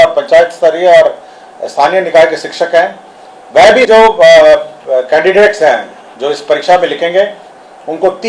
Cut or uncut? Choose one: cut